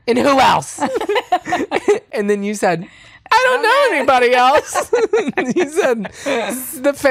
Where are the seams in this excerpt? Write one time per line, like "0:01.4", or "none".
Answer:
none